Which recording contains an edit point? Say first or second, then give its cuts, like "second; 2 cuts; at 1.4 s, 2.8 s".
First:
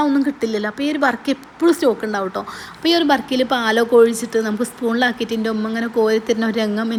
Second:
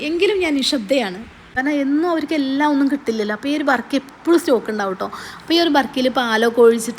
second; 1 cut; at 1.5 s